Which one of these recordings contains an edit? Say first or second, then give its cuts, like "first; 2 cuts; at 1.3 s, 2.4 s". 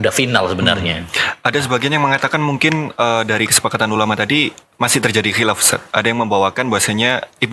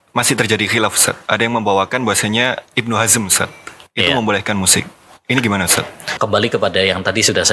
second; 1 cut; at 6.1 s